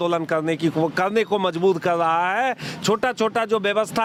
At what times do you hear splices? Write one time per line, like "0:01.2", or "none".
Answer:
none